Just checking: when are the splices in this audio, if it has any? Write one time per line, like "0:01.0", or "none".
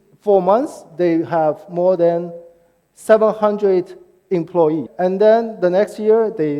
0:04.9